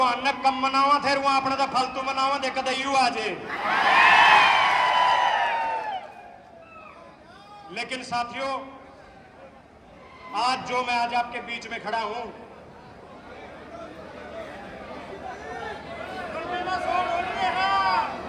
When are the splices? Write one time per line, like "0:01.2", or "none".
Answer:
none